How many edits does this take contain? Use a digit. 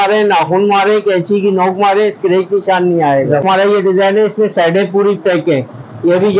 1